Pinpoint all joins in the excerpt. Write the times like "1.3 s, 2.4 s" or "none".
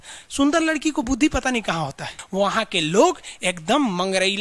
2.2 s